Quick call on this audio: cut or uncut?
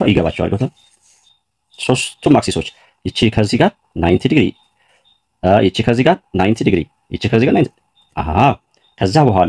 uncut